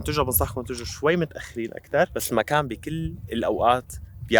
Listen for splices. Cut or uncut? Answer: cut